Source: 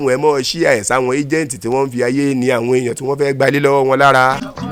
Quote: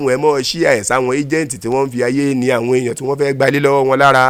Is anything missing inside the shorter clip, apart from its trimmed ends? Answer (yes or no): no